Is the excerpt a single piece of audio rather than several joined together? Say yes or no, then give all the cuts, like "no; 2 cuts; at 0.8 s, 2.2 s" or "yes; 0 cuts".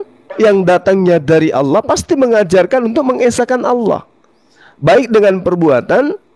yes; 0 cuts